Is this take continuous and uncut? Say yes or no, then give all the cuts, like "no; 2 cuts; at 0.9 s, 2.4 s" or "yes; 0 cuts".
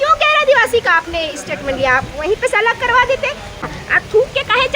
no; 1 cut; at 3.6 s